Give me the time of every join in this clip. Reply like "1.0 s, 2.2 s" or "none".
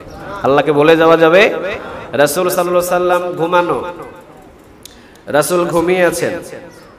none